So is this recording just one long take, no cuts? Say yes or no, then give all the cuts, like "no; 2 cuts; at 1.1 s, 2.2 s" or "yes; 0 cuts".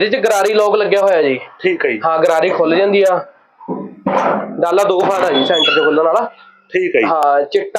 yes; 0 cuts